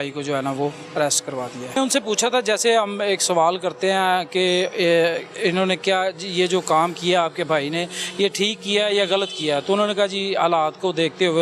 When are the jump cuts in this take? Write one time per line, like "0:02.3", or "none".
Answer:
0:01.8